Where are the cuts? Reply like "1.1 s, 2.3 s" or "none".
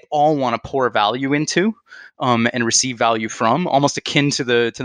none